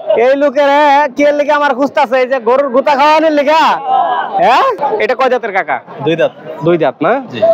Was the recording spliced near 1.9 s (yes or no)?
no